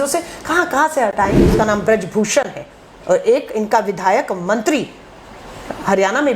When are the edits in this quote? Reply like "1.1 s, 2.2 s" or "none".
1.4 s